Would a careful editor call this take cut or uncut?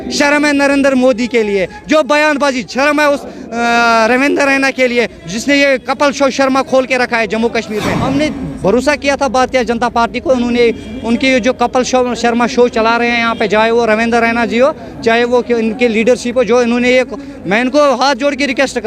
cut